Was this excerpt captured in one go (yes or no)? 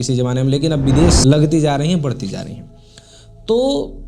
no